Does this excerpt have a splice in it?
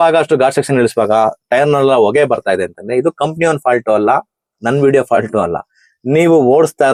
no; 0 cuts

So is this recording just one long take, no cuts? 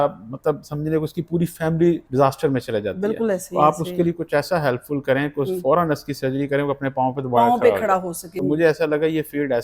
no; 2 cuts; at 2.0 s, 8.2 s

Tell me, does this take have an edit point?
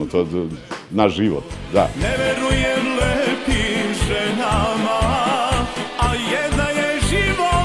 no; 0 cuts

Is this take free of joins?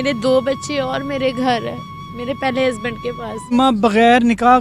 no; 1 cut; at 3.5 s

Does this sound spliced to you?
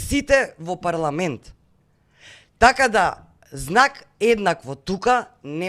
no; 0 cuts

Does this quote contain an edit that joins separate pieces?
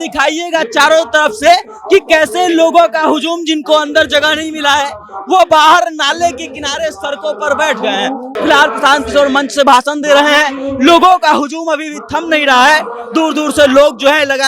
yes; 1 cut; at 8.3 s

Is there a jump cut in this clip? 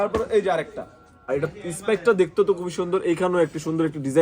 yes; 1 cut; at 1.3 s

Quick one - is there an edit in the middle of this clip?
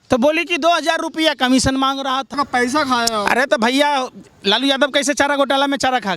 yes; 1 cut; at 2.3 s

